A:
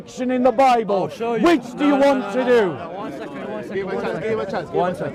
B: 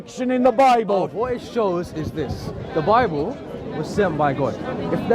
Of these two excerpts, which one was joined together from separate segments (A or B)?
B